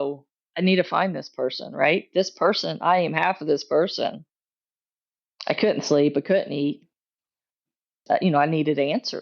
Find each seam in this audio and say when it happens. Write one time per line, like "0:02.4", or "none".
0:08.0